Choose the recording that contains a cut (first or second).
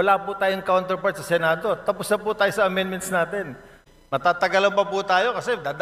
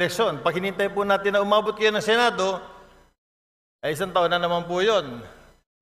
first